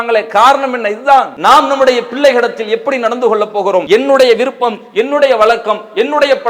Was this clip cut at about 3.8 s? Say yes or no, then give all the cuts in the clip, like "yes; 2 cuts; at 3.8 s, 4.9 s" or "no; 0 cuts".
yes; 2 cuts; at 1.3 s, 3.8 s